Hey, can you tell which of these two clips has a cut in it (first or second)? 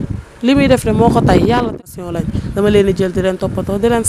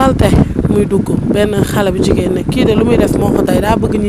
first